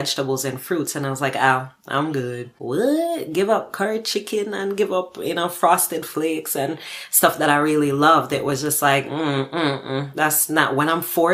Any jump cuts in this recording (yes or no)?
yes